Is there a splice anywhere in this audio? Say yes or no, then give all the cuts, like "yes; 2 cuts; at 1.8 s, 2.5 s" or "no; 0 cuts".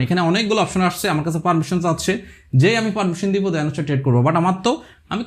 no; 0 cuts